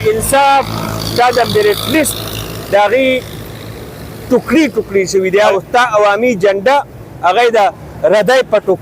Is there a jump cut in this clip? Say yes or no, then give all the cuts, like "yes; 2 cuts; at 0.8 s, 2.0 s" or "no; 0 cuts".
yes; 1 cut; at 5.5 s